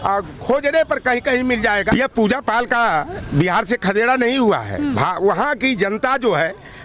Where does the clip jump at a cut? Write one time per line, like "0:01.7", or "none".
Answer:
0:01.9